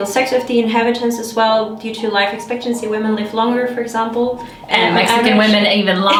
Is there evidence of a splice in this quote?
no; 0 cuts

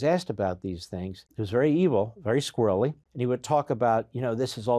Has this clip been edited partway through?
yes; 2 cuts; at 1.3 s, 3.1 s

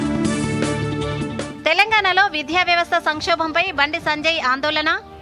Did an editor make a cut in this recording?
yes; 1 cut; at 1.2 s

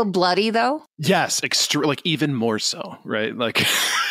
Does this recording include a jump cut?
yes; 1 cut; at 0.9 s

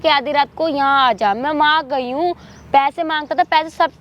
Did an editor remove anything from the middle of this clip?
no; 0 cuts

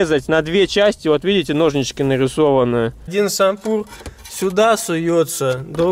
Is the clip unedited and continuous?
no; 1 cut; at 3.1 s

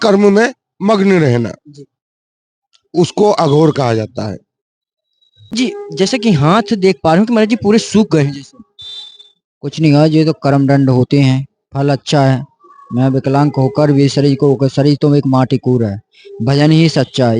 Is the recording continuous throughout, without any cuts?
no; 1 cut; at 5.5 s

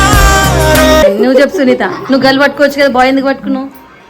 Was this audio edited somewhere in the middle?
yes; 1 cut; at 1.0 s

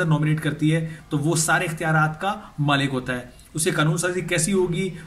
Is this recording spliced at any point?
yes; 1 cut; at 1.0 s

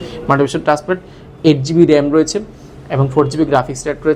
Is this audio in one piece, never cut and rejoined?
yes; 0 cuts

